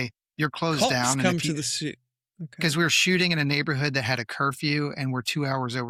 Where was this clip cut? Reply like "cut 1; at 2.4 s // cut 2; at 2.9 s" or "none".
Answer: none